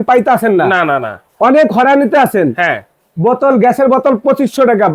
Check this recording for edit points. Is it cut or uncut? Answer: uncut